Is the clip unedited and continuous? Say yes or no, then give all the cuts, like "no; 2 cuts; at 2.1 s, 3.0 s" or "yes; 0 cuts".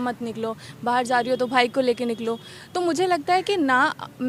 yes; 0 cuts